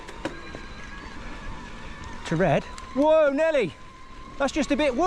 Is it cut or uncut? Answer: uncut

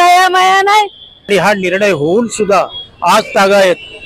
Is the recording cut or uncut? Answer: cut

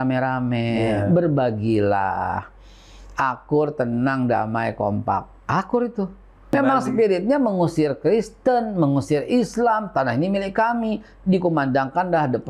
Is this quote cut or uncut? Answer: cut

